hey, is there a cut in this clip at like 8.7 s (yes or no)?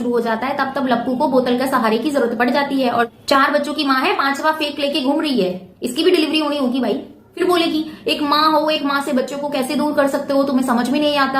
no